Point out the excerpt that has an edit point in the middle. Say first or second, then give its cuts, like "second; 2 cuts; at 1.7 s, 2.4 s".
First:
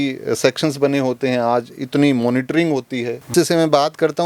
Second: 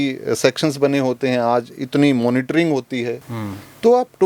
first; 1 cut; at 3.3 s